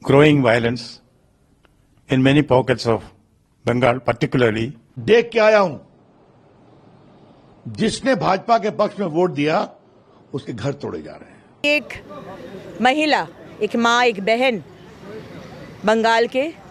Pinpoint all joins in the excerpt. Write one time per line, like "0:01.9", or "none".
0:04.9
0:11.6